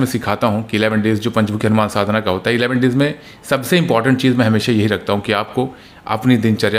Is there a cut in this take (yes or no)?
no